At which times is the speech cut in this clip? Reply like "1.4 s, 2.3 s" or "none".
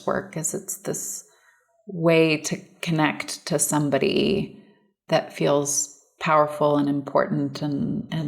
4.9 s